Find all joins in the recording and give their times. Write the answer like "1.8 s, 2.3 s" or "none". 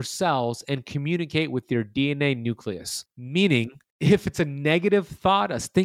3.3 s